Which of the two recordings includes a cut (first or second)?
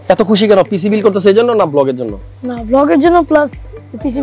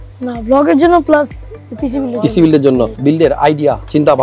second